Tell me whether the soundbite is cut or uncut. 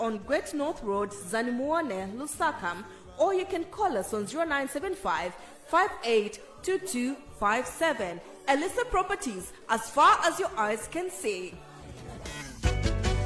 cut